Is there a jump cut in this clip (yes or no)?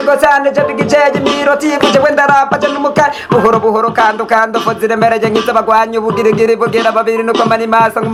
no